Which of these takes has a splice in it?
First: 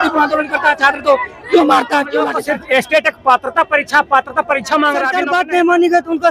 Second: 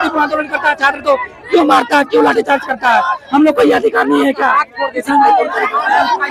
first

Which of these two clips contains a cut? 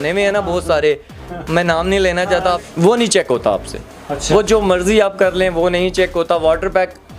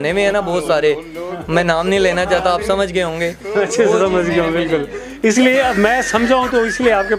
first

